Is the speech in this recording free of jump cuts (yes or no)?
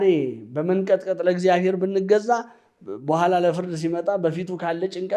yes